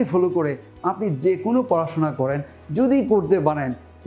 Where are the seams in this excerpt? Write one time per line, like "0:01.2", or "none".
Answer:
none